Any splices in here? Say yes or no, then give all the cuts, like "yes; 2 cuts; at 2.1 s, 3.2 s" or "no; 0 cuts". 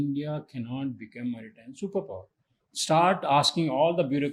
no; 0 cuts